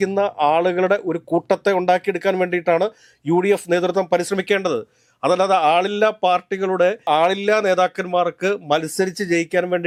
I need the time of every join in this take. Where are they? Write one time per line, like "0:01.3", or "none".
none